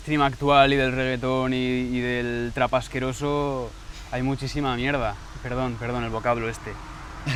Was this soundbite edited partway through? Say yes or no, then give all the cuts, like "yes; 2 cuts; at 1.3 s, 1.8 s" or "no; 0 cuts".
no; 0 cuts